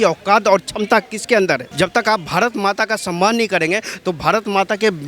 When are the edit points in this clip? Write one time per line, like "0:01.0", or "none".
0:01.7